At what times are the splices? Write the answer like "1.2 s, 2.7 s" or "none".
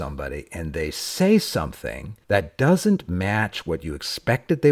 none